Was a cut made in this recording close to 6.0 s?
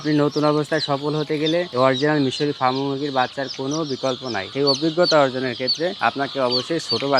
yes; 3 cuts; at 1.7 s, 4.5 s, 6.0 s

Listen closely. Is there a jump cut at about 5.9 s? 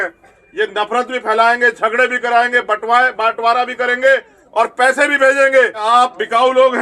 yes; 1 cut; at 5.9 s

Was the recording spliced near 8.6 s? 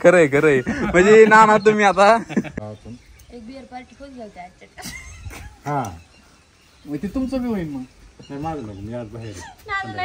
no; 1 cut; at 2.5 s

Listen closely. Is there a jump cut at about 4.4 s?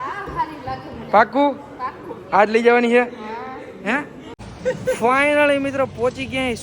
yes; 1 cut; at 4.4 s

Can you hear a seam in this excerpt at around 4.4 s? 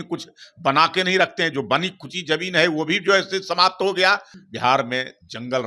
yes; 1 cut; at 4.4 s

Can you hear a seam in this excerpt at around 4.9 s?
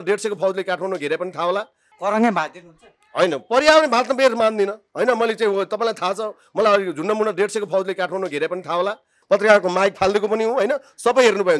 no; 2 cuts; at 1.8 s, 9.2 s

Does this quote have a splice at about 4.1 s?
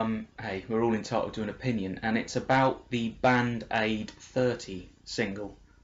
no; 0 cuts

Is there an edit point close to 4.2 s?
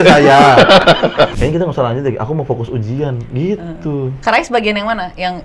no; 1 cut; at 1.3 s

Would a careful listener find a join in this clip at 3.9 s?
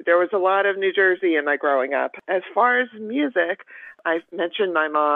yes; 2 cuts; at 2.2 s, 3.9 s

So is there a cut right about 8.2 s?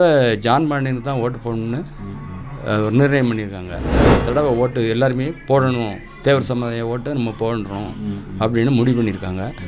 no; 1 cut; at 4.0 s

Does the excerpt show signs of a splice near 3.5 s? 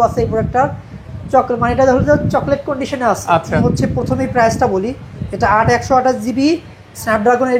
yes; 1 cut; at 3.5 s

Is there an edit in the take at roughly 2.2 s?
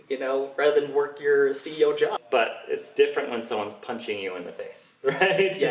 yes; 1 cut; at 2.2 s

